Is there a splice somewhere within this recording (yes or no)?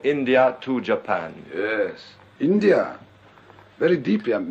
yes